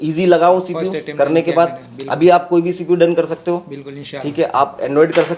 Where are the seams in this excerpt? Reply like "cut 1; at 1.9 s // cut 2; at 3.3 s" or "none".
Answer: none